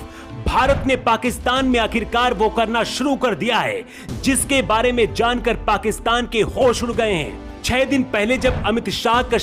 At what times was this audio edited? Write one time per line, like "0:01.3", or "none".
none